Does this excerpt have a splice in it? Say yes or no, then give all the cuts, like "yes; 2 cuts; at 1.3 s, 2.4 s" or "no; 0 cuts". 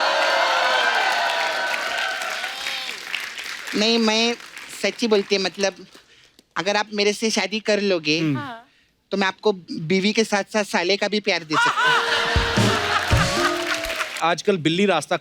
yes; 1 cut; at 14.2 s